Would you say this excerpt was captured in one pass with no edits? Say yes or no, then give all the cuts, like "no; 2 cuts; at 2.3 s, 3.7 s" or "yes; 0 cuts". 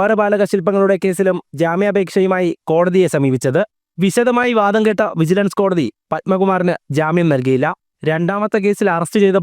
no; 2 cuts; at 3.8 s, 7.9 s